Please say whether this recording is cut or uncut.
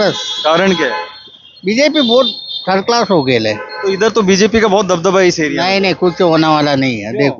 uncut